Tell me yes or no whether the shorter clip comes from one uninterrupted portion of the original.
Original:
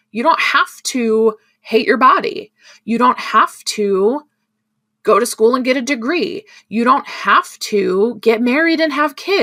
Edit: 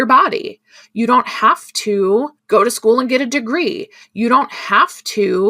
no